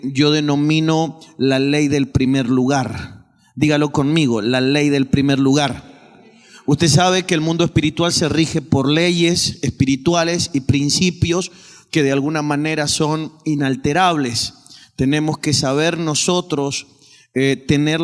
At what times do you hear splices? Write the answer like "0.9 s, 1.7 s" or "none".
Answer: 12.0 s